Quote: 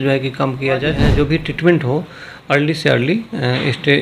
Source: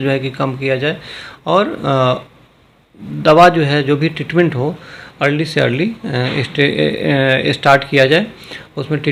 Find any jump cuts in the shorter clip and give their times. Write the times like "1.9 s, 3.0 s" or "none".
1.0 s